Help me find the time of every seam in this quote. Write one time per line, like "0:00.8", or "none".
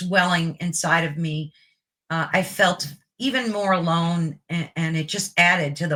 none